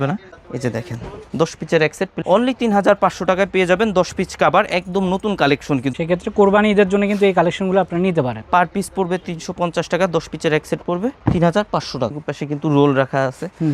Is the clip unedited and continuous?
no; 4 cuts; at 2.1 s, 5.9 s, 8.4 s, 12.3 s

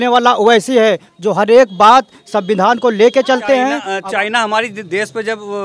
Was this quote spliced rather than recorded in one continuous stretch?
yes; 1 cut; at 3.9 s

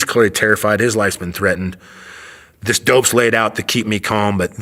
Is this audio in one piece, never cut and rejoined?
yes; 0 cuts

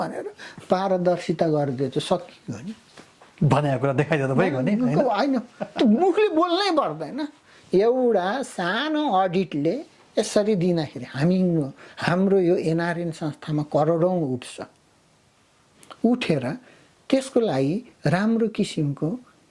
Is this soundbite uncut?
yes; 0 cuts

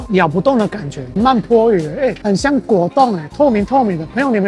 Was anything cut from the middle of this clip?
yes; 2 cuts; at 1.1 s, 2.2 s

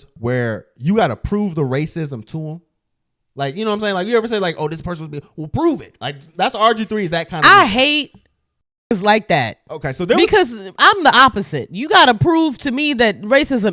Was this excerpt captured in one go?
yes; 0 cuts

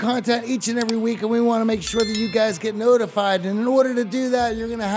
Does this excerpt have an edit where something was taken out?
no; 0 cuts

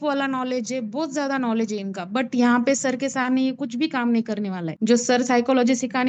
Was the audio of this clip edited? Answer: no; 0 cuts

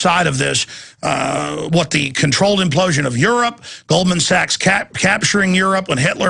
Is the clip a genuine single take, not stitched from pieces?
yes; 0 cuts

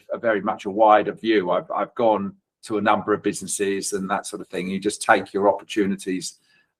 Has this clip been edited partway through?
no; 0 cuts

